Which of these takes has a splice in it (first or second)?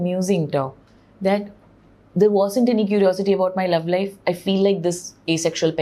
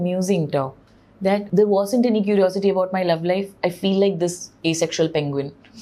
second